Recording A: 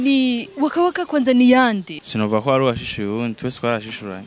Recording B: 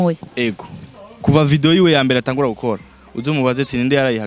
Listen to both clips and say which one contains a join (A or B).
A